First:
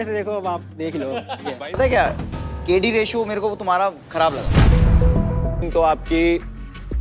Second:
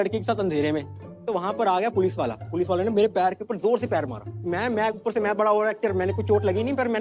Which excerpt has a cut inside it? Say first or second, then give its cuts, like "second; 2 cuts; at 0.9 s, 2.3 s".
first; 2 cuts; at 1.7 s, 5.6 s